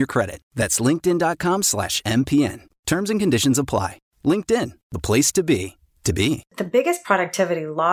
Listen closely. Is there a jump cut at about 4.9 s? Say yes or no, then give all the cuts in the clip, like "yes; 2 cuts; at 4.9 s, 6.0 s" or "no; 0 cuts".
no; 1 cut; at 6.6 s